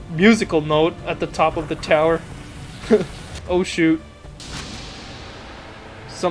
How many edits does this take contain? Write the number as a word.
one